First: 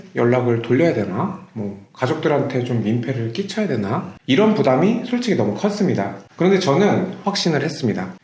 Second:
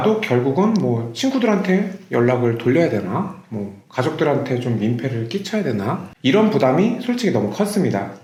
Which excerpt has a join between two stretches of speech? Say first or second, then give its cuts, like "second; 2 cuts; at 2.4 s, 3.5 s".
first; 1 cut; at 7.2 s